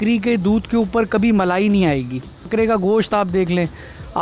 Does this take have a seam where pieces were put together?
yes; 1 cut; at 2.5 s

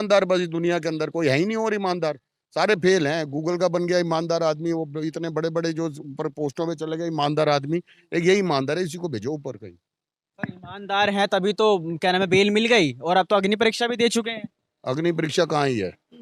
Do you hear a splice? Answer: no; 0 cuts

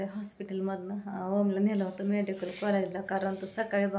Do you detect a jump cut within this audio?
no; 0 cuts

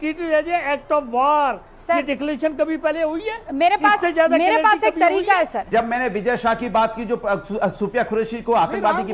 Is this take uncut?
no; 1 cut; at 5.7 s

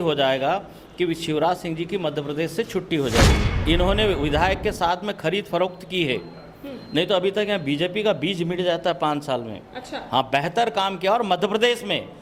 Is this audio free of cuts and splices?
no; 1 cut; at 3.5 s

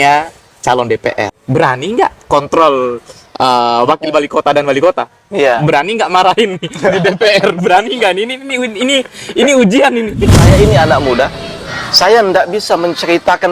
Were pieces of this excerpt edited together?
yes; 2 cuts; at 1.3 s, 10.3 s

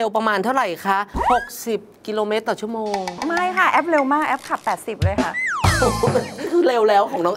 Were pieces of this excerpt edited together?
no; 0 cuts

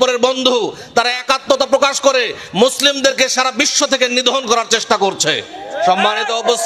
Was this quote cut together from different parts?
no; 0 cuts

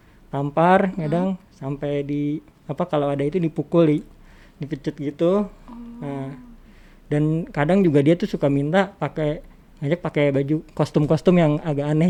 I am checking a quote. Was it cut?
no; 0 cuts

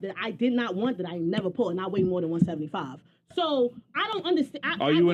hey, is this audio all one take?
yes; 0 cuts

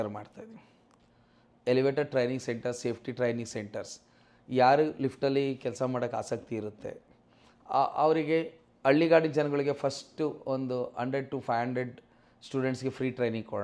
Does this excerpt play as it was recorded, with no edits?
yes; 0 cuts

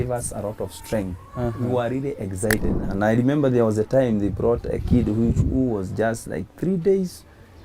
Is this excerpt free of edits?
no; 1 cut; at 2.7 s

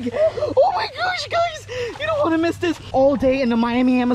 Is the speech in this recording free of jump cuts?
no; 1 cut; at 2.8 s

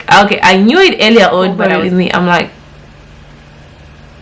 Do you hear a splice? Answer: yes; 1 cut; at 1.6 s

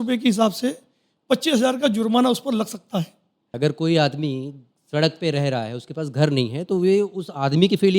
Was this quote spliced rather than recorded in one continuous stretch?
yes; 1 cut; at 3.5 s

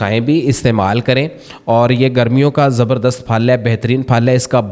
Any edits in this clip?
no; 0 cuts

